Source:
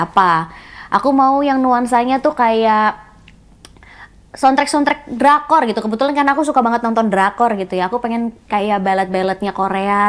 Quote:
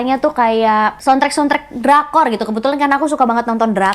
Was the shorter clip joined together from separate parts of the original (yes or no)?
yes